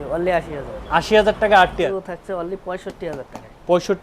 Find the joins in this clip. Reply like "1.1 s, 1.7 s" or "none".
1.9 s